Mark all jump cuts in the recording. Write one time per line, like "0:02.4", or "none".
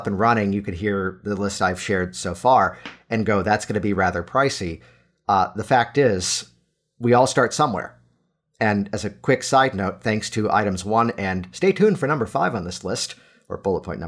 none

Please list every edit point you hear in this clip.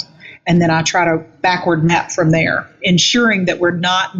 0:01.3
0:02.8

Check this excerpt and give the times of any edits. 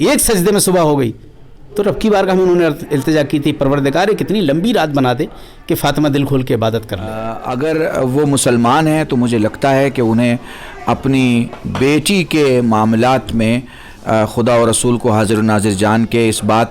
0:07.3

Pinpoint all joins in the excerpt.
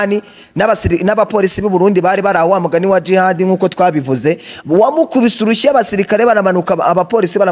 none

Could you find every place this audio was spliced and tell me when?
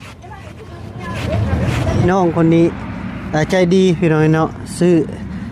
0:02.0

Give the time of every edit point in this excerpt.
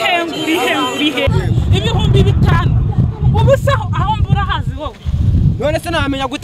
0:01.3

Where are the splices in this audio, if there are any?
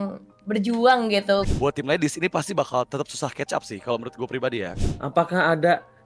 0:01.5
0:04.7

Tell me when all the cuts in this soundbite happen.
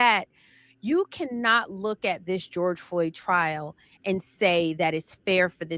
none

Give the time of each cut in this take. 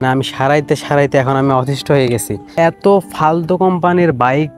0:02.5

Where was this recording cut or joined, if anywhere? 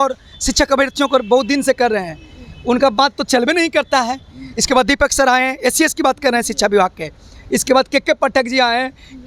0:04.5

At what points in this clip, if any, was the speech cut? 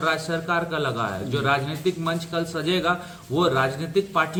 none

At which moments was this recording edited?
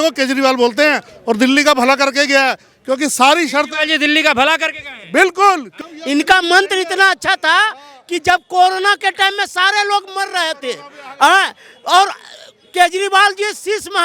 0:05.7

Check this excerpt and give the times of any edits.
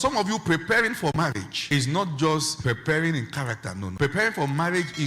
0:01.2
0:02.5
0:03.8

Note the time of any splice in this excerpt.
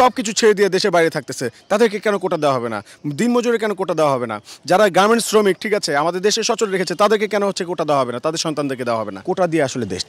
0:09.2

